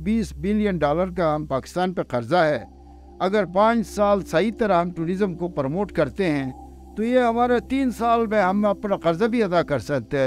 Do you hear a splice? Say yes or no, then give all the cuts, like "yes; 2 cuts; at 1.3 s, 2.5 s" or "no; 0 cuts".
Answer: no; 0 cuts